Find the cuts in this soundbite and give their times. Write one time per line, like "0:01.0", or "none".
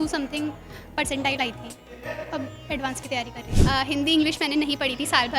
0:03.5